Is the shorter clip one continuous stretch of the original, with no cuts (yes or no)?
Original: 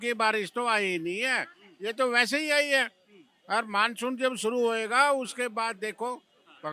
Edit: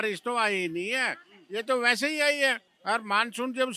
no